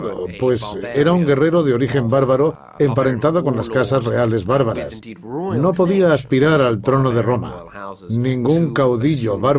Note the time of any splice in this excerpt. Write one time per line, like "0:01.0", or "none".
0:06.1